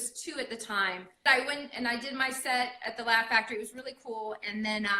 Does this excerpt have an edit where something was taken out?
yes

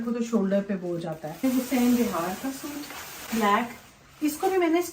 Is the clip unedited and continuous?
no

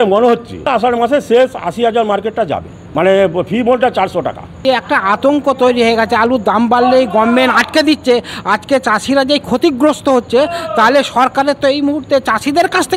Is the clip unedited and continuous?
no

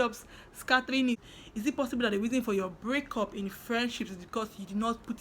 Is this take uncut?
no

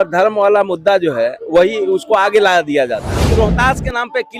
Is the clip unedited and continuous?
no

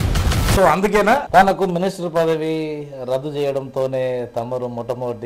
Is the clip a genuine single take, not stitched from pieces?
no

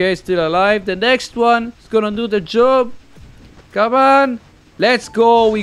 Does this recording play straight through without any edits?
yes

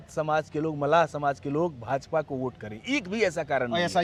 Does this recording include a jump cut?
no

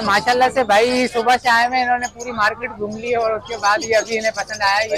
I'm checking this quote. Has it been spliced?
no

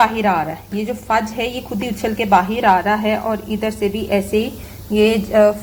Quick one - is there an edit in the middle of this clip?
no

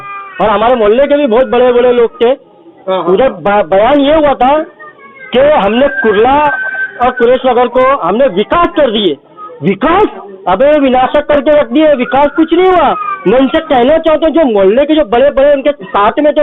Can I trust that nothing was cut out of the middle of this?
yes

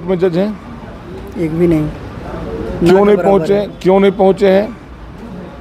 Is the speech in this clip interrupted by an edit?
no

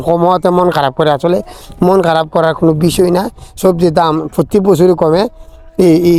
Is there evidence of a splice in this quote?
no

